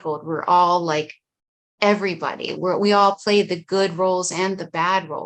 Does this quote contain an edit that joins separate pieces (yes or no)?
no